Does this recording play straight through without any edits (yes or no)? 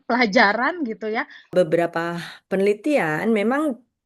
no